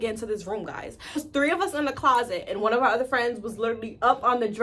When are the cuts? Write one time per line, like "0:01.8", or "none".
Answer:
0:01.2